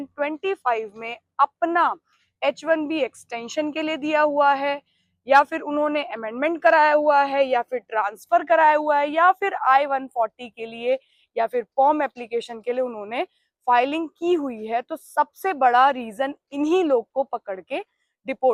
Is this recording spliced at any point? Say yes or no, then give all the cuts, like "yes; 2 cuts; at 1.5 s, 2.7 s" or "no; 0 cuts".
no; 0 cuts